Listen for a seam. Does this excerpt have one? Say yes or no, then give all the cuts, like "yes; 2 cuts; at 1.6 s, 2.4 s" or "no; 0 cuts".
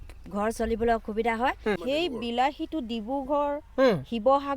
yes; 1 cut; at 1.8 s